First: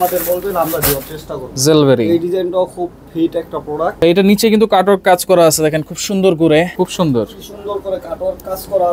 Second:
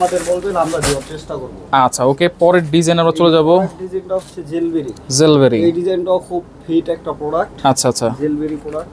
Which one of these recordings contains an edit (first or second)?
first